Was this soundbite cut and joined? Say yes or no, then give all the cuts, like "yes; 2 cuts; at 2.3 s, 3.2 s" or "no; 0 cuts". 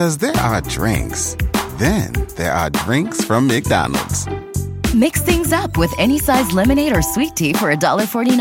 no; 0 cuts